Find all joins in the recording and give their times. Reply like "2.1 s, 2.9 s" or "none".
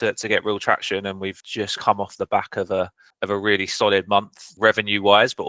1.4 s, 3.1 s, 4.4 s